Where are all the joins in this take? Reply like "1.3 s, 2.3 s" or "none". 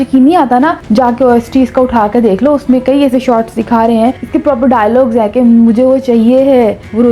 none